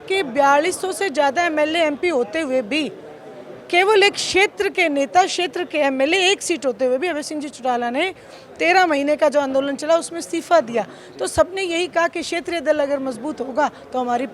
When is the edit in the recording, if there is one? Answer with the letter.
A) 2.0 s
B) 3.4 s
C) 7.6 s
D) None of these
D